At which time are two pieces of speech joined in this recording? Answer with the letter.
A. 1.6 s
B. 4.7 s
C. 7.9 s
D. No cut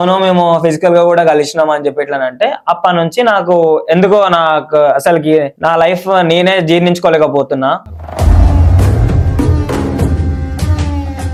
D